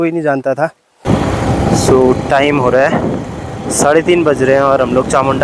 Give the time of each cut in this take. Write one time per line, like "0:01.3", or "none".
0:01.1